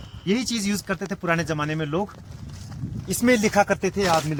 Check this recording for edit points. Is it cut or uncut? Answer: uncut